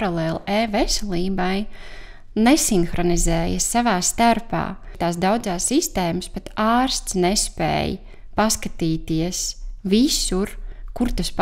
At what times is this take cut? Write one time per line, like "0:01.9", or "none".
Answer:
0:05.0